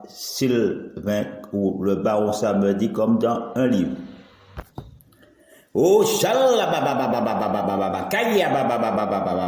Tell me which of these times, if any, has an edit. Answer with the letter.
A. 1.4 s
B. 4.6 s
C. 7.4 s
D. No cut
B